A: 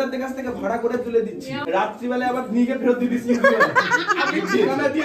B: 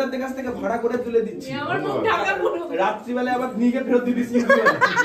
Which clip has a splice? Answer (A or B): A